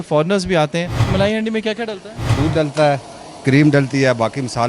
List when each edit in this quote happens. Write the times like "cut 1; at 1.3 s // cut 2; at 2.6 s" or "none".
cut 1; at 1.0 s // cut 2; at 2.3 s

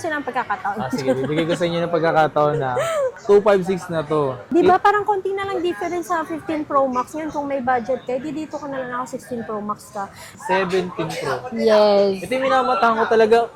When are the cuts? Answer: cut 1; at 10.3 s

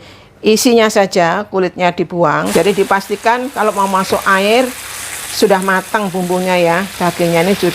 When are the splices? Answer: cut 1; at 2.5 s

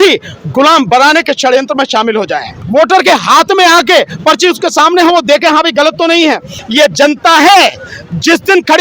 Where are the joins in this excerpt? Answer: cut 1; at 2.6 s // cut 2; at 6.6 s

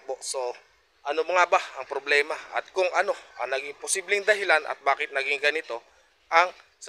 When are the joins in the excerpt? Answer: none

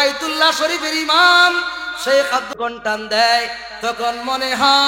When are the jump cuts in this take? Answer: cut 1; at 2.5 s

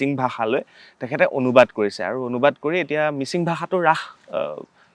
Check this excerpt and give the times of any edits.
none

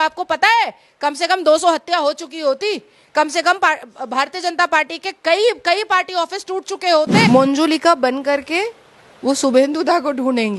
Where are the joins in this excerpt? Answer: cut 1; at 7.3 s

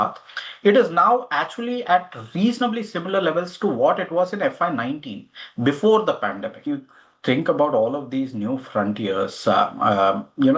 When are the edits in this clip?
cut 1; at 6.7 s

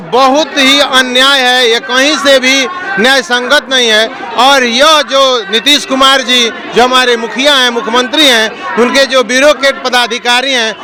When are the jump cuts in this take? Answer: none

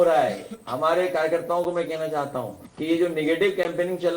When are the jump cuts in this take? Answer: cut 1; at 2.6 s

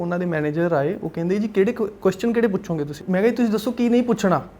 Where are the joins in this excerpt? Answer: cut 1; at 3.0 s

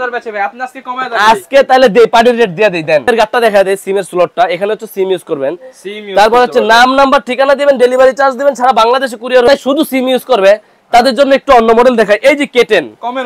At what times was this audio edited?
cut 1; at 3.1 s // cut 2; at 9.5 s

